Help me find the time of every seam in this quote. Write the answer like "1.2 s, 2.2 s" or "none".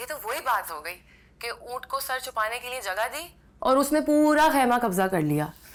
none